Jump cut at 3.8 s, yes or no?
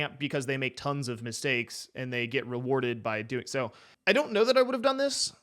yes